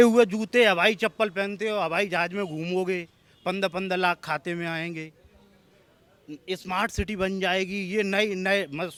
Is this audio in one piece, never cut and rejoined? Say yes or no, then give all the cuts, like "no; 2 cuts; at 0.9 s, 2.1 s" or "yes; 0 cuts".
yes; 0 cuts